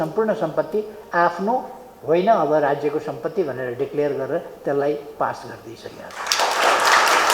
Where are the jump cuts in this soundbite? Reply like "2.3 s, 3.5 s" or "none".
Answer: none